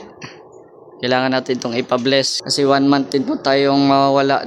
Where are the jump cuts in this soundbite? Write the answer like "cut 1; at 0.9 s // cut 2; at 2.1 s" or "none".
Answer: cut 1; at 2.4 s